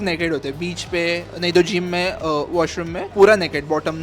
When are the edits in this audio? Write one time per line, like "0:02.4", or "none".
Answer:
0:03.0